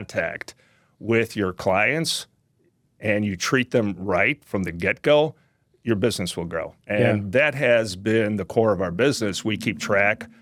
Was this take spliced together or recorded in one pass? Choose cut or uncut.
uncut